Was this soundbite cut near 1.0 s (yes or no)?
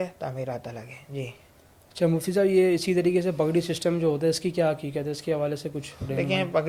no